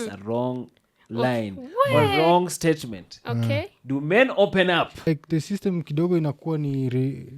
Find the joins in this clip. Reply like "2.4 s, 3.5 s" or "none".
5.0 s